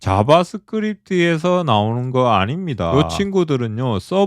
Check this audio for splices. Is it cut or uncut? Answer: cut